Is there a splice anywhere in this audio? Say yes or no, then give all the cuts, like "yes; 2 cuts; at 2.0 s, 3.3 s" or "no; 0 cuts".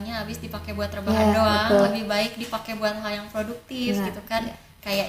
no; 0 cuts